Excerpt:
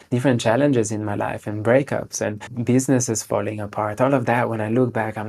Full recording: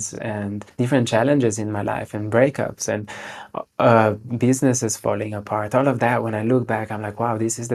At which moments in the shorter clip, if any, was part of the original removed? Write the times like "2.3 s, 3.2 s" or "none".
2.5 s